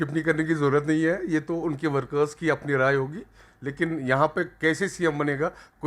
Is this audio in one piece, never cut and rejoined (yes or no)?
yes